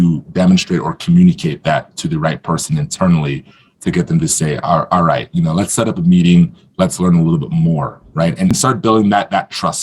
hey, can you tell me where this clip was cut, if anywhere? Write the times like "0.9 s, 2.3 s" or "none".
8.5 s